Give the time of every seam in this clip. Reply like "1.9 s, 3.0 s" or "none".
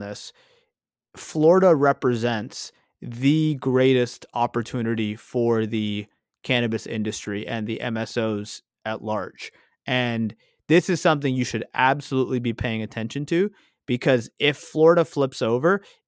none